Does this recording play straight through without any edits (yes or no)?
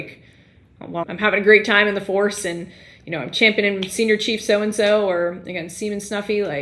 no